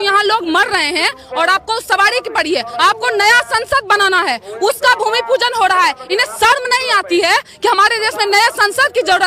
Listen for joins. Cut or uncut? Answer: uncut